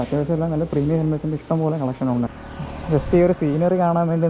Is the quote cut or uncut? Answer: cut